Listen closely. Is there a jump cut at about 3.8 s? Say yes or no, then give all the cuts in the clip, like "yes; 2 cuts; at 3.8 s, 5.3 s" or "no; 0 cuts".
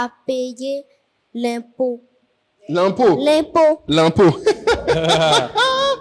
no; 0 cuts